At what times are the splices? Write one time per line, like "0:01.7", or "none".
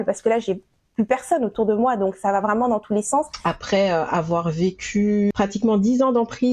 0:03.3
0:05.3